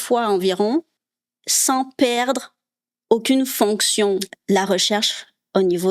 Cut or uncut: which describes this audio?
cut